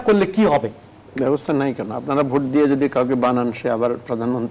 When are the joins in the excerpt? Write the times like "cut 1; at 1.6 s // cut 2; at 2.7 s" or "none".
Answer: none

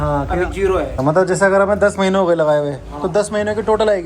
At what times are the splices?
cut 1; at 1.0 s

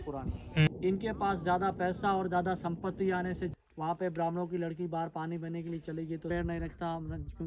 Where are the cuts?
cut 1; at 0.7 s // cut 2; at 3.5 s // cut 3; at 6.3 s

